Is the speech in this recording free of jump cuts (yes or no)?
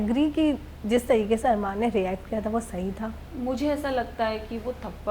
no